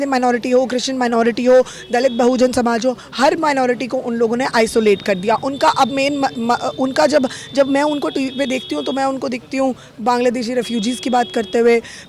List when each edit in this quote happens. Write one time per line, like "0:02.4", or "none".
none